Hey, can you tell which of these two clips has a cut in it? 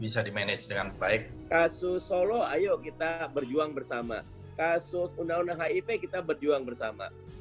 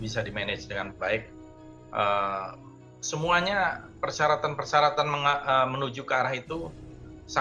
first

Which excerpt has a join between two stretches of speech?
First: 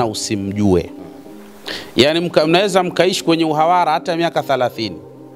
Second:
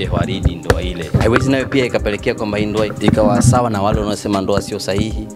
second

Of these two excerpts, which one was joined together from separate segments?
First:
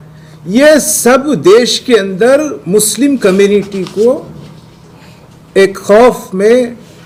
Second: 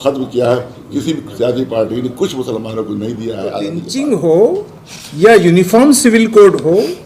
second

